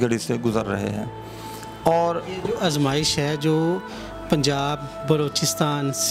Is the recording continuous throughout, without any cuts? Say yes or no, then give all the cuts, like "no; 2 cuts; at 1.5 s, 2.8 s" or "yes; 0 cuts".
yes; 0 cuts